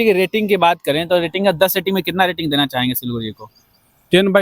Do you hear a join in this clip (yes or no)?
no